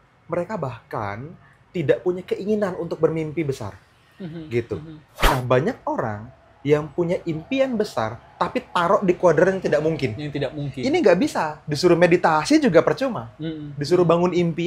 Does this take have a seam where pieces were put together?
yes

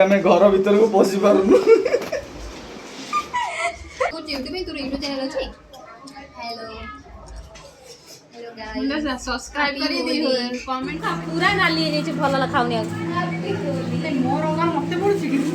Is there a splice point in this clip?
yes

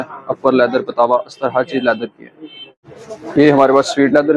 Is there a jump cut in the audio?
no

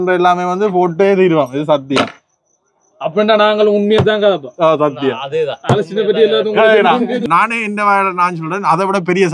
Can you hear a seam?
yes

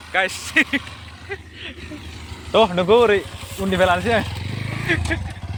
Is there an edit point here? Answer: no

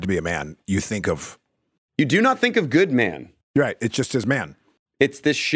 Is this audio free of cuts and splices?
yes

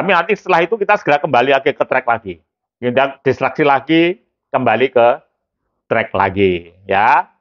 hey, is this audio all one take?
yes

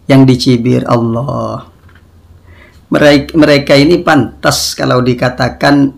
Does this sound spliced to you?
no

